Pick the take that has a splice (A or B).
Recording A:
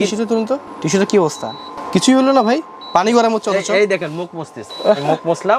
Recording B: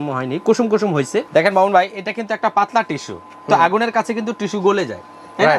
B